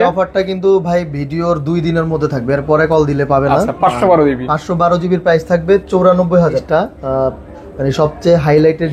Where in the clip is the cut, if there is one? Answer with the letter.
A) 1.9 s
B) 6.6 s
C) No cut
B